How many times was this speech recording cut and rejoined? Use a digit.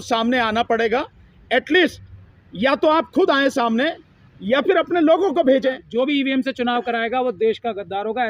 1